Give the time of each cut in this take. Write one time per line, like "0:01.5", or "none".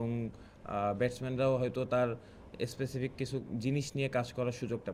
none